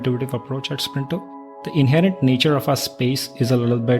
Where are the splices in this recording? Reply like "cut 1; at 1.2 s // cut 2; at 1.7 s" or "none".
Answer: cut 1; at 1.6 s